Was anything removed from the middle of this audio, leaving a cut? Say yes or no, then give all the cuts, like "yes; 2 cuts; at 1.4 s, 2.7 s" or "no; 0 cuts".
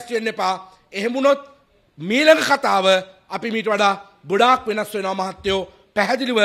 no; 0 cuts